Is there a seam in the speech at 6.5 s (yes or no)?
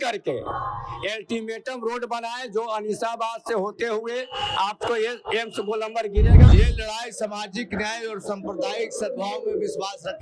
yes